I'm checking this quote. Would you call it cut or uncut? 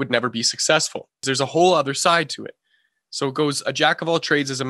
cut